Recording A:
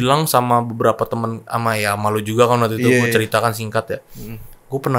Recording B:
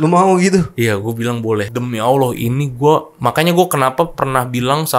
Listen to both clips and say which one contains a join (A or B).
B